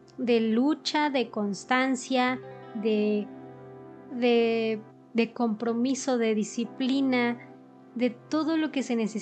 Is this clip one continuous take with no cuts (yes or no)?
yes